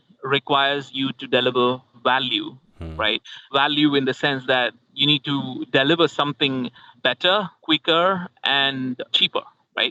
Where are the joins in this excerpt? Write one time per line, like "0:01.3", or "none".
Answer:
none